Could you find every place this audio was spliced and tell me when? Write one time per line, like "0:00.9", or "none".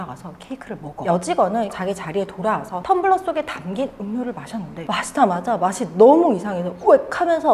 0:01.0
0:01.7

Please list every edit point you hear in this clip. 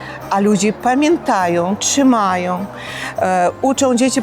none

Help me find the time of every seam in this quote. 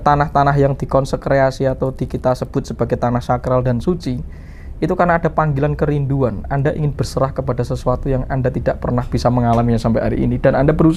none

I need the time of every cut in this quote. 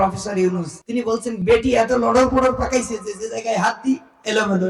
0:01.1

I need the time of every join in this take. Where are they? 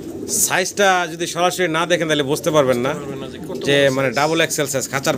none

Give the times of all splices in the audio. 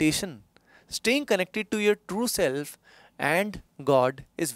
none

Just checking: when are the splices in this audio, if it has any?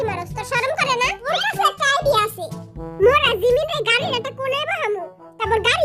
0:01.3

